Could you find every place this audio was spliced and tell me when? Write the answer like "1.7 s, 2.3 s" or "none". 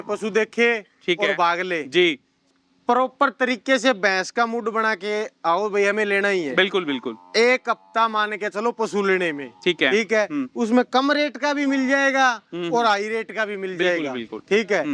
none

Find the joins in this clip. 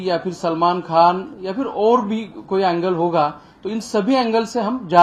none

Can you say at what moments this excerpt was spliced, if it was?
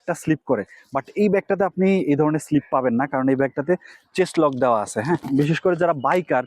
5.2 s

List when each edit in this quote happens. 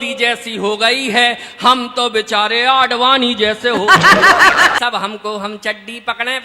4.8 s

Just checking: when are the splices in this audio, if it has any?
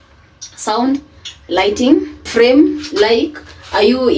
2.2 s

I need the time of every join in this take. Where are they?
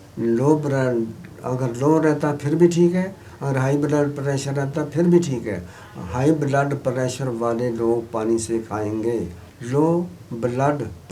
none

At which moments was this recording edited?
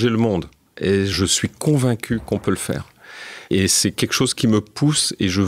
1.1 s, 3.6 s

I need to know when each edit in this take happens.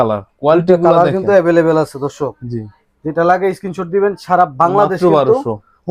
none

